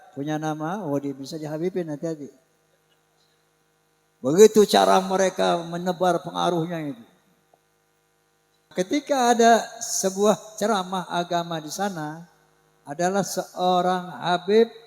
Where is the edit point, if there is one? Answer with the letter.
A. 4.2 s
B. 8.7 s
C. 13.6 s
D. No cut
B